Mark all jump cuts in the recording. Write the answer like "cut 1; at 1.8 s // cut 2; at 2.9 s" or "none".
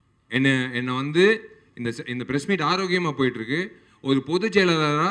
none